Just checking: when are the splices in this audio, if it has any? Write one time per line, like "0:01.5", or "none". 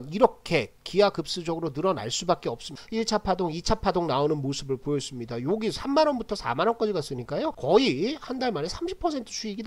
0:02.8
0:07.6